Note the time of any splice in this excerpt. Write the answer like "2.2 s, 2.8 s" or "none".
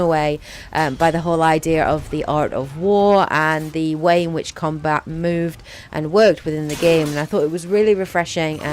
6.2 s